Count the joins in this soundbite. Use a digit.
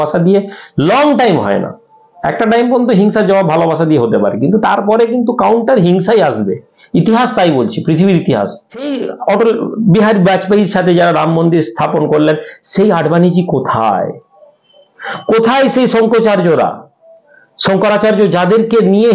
1